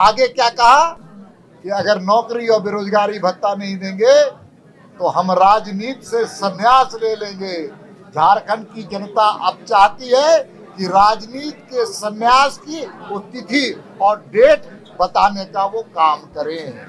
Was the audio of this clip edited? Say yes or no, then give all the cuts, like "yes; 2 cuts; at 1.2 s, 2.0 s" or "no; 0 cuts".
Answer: no; 0 cuts